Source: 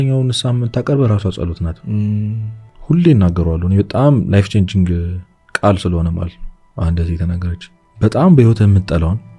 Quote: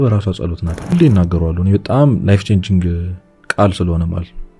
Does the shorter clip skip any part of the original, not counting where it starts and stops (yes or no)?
yes